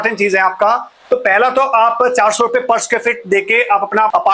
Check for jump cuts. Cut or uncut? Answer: uncut